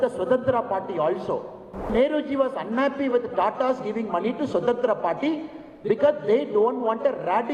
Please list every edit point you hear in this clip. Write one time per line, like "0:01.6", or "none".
0:01.9